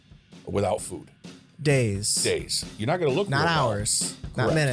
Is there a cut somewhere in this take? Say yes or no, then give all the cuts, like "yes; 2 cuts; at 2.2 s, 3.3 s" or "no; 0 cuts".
no; 0 cuts